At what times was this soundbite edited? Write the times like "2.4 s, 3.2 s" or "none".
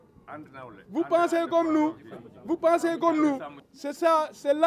3.5 s